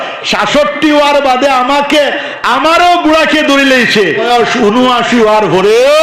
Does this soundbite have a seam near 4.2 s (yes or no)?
yes